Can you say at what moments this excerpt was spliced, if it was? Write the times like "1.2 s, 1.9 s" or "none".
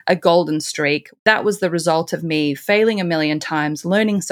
1.1 s

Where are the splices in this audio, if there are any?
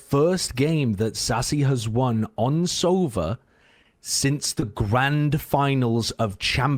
none

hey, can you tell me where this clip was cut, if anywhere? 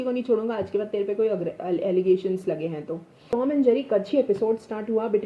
3.3 s

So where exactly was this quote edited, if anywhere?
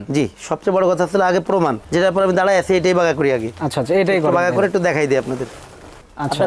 none

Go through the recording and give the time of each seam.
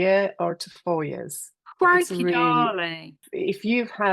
3.2 s

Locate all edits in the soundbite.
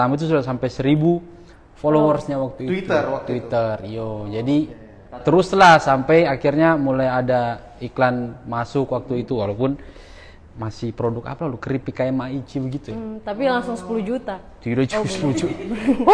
none

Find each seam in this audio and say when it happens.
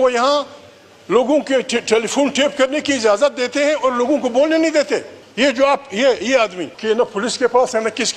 5.2 s, 6.7 s

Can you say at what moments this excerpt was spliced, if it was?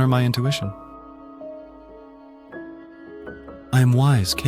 1.1 s, 3.4 s

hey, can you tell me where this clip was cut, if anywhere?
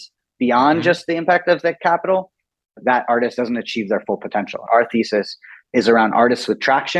2.8 s, 4.6 s

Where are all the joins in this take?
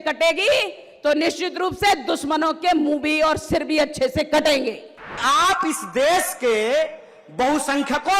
5.2 s

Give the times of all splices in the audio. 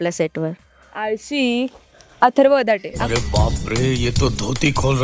none

